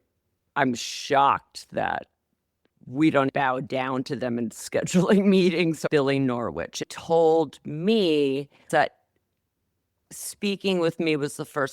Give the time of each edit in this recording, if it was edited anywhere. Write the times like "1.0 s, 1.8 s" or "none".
3.3 s, 5.8 s, 6.8 s, 8.7 s